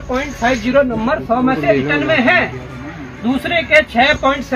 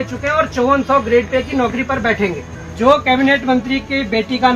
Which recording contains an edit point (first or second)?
second